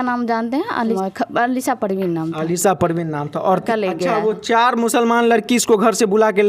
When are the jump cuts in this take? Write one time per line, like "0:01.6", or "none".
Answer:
0:01.0
0:03.6